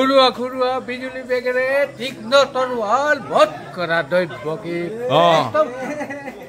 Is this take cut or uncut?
uncut